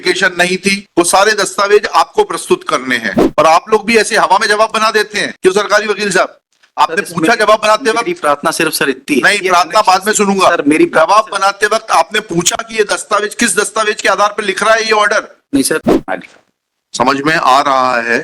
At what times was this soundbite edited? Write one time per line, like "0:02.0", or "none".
0:03.2
0:15.9